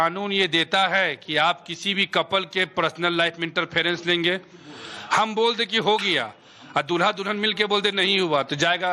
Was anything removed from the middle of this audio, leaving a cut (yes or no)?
yes